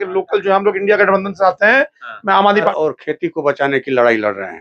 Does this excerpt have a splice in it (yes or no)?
yes